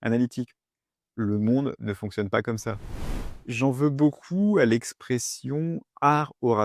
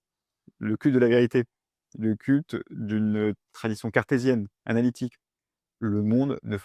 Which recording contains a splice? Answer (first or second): first